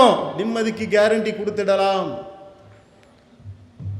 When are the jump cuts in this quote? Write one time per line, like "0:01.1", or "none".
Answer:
none

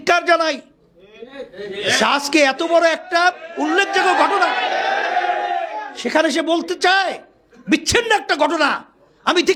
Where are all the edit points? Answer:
none

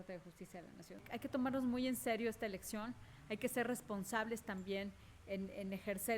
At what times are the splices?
0:01.1

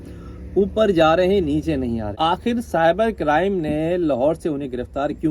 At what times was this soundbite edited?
0:02.1

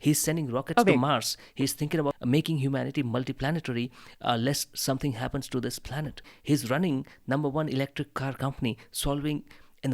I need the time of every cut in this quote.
0:02.2
0:06.3

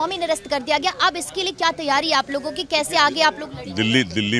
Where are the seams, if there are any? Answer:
none

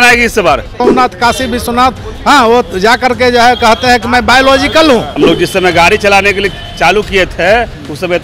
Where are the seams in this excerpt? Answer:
0:00.8
0:05.1

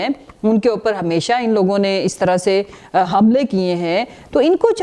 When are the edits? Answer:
none

